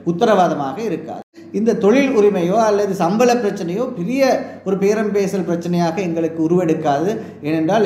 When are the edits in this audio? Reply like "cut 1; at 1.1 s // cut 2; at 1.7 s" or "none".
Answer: cut 1; at 1.4 s